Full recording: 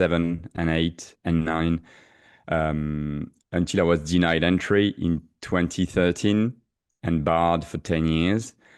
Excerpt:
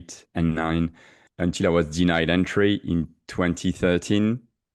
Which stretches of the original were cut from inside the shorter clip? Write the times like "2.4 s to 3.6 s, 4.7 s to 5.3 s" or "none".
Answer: 2.1 s to 3.3 s